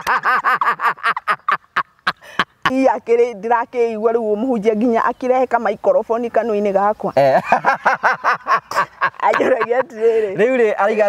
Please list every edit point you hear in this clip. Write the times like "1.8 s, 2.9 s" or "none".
2.7 s